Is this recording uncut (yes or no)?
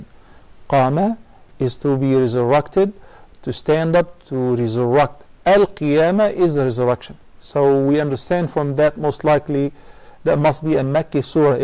no